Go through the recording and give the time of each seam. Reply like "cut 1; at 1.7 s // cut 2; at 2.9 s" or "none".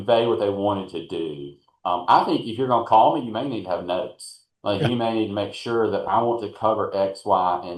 none